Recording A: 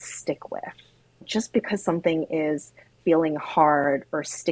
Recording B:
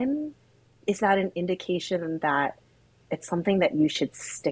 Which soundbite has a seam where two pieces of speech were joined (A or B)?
A